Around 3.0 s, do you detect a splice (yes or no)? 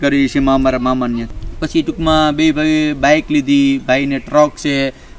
no